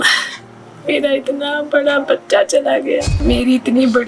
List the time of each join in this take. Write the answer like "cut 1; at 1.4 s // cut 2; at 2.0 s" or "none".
cut 1; at 3.1 s